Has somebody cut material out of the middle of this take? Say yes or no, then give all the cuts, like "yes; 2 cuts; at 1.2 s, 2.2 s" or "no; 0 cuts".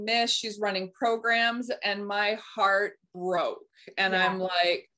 no; 0 cuts